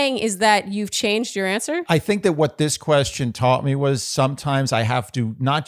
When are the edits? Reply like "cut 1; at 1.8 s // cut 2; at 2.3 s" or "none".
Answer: cut 1; at 1.9 s